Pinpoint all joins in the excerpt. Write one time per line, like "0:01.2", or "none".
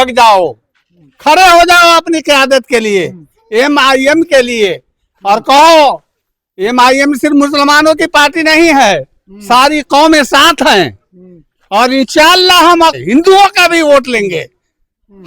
0:12.9